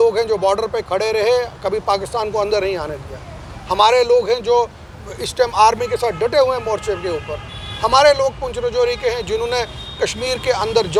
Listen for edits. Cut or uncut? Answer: uncut